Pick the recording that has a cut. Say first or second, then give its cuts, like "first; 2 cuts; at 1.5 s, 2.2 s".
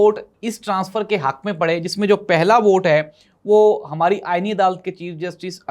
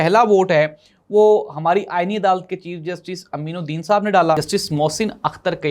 second; 1 cut; at 4.4 s